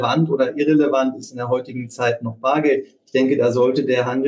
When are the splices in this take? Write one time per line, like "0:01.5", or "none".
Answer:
none